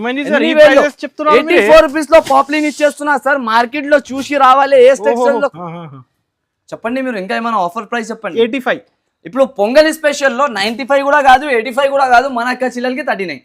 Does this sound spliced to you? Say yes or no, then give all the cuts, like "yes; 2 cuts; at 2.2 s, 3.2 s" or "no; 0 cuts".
yes; 1 cut; at 5.5 s